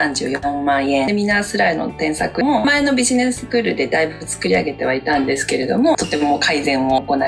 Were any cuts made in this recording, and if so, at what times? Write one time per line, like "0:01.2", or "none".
0:01.1
0:02.4
0:06.0

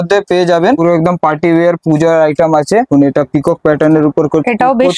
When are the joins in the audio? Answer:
0:00.8
0:02.9

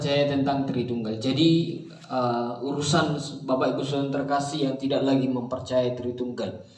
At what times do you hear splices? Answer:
none

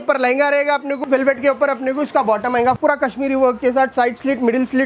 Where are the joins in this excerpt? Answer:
0:00.9
0:02.8

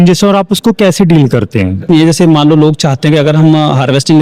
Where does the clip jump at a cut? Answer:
0:01.8

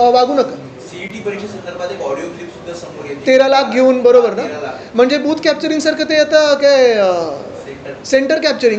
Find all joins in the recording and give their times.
none

